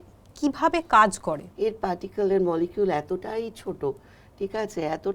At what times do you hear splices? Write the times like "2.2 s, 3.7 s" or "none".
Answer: 1.5 s